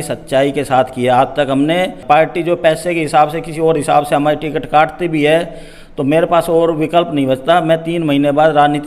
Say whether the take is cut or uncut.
cut